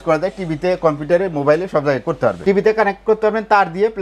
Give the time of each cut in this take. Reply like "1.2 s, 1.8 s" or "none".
2.4 s